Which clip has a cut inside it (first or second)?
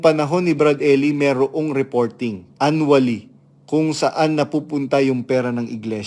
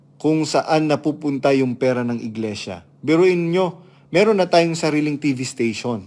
first